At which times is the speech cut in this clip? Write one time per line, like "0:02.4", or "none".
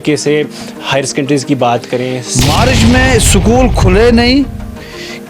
0:02.3